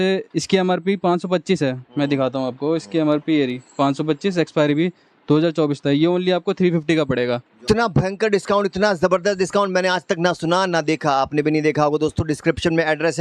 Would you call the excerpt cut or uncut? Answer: uncut